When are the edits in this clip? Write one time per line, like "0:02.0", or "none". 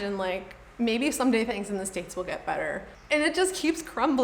0:03.0